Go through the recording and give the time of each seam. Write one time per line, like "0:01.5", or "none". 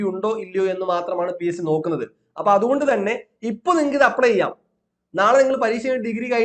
none